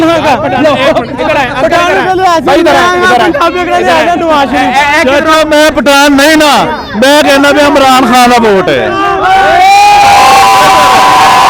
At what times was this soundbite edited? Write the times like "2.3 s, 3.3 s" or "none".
none